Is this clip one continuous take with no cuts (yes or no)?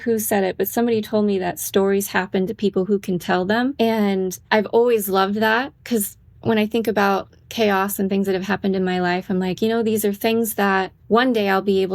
no